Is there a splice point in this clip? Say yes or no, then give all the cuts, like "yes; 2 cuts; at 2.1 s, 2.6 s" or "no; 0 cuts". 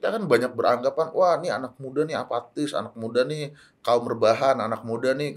no; 0 cuts